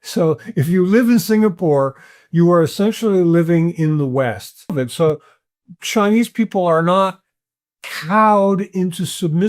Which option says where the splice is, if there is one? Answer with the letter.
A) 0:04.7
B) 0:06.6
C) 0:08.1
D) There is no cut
A